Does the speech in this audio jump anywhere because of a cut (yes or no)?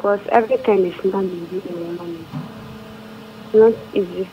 no